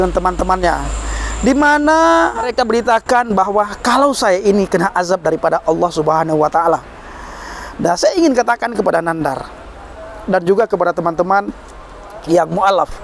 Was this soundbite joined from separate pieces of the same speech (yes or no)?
yes